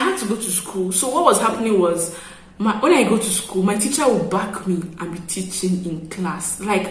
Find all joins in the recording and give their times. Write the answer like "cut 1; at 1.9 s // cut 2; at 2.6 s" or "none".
none